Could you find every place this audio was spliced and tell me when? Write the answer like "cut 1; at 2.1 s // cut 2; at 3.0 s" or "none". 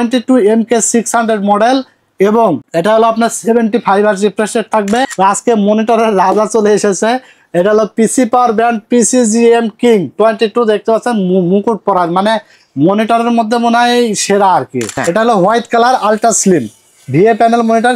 cut 1; at 2.6 s // cut 2; at 5.1 s // cut 3; at 14.9 s